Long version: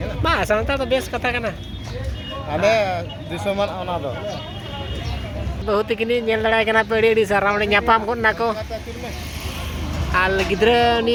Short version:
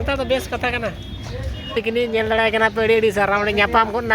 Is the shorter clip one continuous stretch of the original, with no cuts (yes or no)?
no